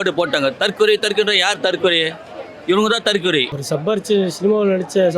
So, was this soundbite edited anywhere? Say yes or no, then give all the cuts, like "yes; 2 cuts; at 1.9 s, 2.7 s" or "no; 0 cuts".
yes; 1 cut; at 3.6 s